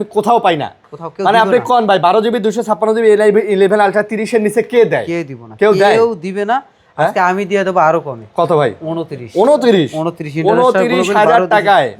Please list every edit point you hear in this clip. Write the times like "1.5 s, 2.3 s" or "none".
none